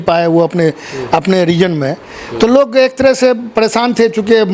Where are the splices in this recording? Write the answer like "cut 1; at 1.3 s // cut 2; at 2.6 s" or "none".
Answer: none